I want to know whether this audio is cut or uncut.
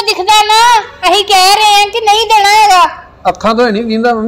uncut